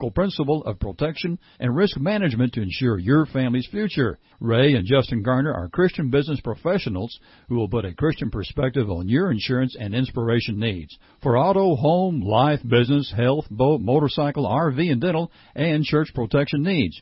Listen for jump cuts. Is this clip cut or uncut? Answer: uncut